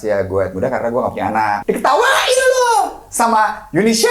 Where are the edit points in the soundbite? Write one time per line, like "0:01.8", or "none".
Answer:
0:01.6